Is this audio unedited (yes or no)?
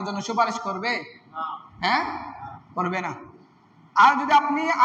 yes